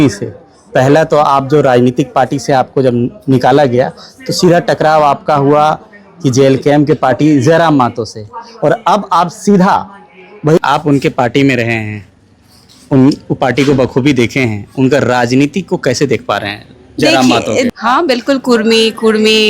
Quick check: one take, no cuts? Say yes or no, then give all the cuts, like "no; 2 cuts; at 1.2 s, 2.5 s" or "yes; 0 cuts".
no; 2 cuts; at 10.6 s, 17.7 s